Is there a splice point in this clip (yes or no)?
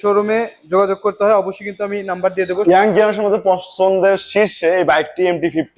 yes